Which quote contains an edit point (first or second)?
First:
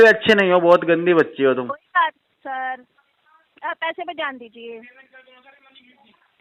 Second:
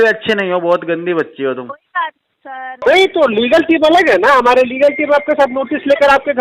second